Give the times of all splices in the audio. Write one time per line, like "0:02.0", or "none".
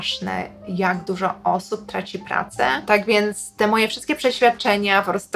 0:02.8